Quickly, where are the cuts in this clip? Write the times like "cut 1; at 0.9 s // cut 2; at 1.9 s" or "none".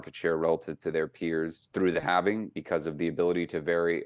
cut 1; at 1.6 s // cut 2; at 2.5 s